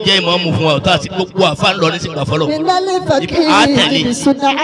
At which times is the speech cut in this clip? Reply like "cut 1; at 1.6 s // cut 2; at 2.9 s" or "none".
none